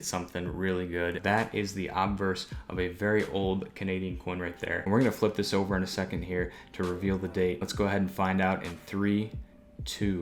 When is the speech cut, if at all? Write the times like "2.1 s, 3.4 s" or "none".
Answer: 1.2 s, 4.7 s, 7.7 s